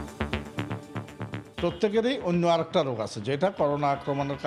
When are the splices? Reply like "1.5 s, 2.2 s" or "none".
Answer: 1.4 s